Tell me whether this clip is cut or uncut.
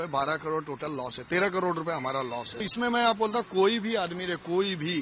cut